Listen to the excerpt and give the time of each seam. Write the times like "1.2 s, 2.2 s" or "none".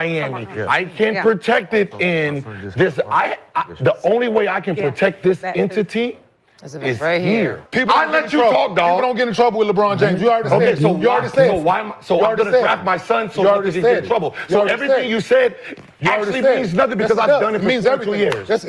7.6 s